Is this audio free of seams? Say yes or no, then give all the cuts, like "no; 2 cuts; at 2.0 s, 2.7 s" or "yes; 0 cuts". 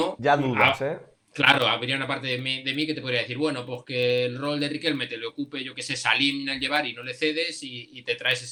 yes; 0 cuts